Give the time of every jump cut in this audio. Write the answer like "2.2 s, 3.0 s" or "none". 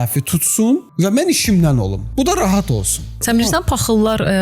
0.9 s, 2.0 s, 3.2 s